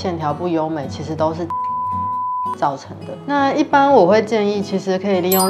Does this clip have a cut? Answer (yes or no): yes